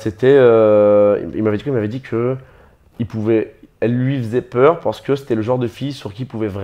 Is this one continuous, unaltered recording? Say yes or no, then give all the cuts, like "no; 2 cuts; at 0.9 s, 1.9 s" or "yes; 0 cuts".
yes; 0 cuts